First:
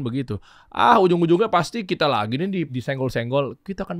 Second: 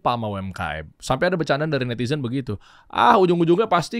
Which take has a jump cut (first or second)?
first